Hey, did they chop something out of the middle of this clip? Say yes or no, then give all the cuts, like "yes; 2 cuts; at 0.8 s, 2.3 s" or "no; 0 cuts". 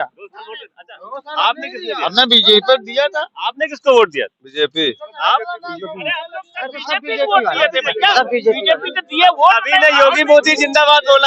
no; 0 cuts